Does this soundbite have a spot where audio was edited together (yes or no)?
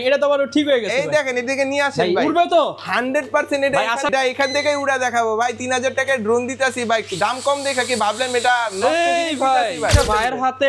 yes